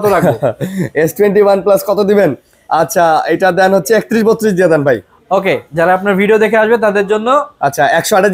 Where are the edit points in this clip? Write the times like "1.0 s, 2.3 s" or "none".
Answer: none